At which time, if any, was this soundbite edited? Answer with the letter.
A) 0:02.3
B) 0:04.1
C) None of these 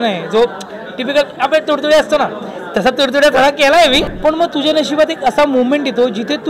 B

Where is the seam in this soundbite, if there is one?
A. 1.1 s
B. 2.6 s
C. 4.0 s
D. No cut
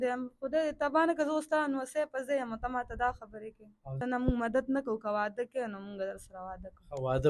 C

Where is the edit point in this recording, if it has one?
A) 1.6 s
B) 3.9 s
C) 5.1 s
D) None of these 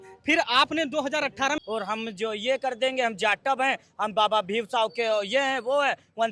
A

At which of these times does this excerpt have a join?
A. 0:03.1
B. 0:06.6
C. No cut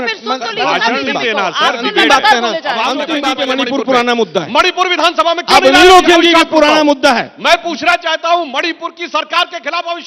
A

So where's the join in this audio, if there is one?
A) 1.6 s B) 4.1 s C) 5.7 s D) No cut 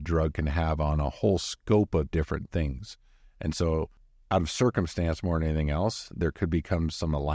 B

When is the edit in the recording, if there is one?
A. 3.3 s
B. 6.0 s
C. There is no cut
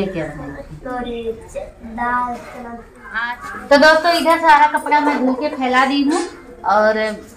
A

